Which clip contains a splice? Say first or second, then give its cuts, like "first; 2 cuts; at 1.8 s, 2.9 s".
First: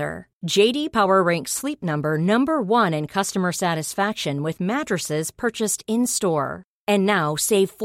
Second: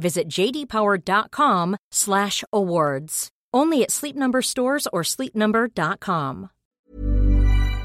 second; 1 cut; at 6.9 s